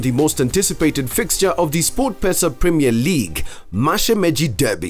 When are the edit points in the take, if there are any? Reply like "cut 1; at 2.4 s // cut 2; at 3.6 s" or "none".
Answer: none